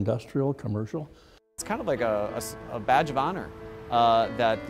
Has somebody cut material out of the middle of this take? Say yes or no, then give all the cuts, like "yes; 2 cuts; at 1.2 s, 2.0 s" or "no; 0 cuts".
yes; 1 cut; at 1.2 s